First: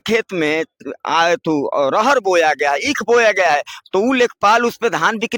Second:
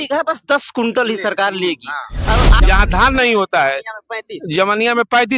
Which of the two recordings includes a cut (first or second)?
second